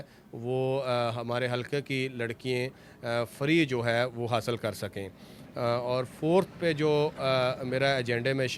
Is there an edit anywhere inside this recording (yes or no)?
no